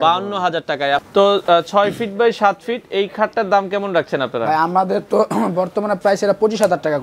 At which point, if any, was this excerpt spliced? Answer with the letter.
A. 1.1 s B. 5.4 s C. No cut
A